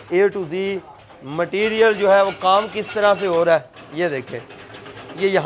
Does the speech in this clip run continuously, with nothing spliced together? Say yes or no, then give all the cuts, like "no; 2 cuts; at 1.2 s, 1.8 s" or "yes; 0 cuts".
yes; 0 cuts